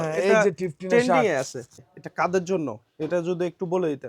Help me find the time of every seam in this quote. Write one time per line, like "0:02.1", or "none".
0:01.9